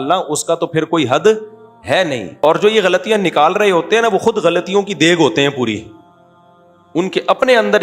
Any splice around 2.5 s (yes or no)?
yes